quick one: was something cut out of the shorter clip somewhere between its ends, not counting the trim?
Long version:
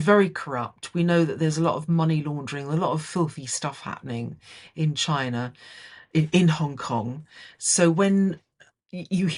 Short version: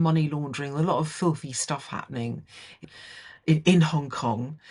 yes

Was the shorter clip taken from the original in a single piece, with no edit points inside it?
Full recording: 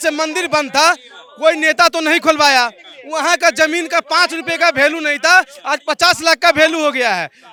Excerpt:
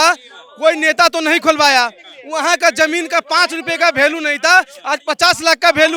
yes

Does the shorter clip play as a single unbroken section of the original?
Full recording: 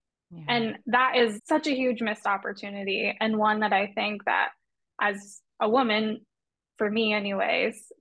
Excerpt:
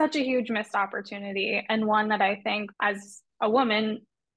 no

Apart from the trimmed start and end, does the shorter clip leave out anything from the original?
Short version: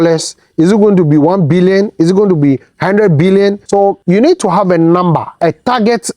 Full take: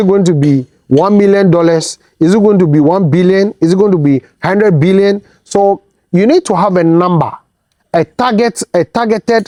yes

